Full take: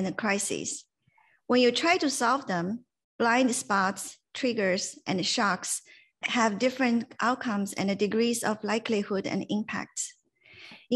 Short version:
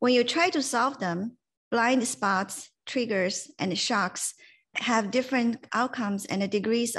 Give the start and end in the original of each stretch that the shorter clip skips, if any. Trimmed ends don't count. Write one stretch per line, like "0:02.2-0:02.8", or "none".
none